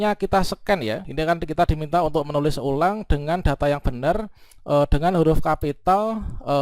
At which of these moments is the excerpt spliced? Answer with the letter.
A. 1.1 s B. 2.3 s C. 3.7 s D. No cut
A